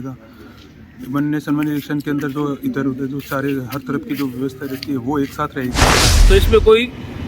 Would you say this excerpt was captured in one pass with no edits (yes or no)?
no